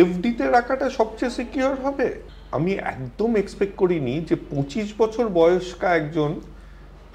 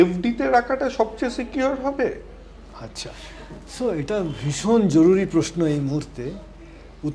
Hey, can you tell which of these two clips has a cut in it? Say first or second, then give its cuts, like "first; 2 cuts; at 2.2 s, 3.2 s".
first; 1 cut; at 2.3 s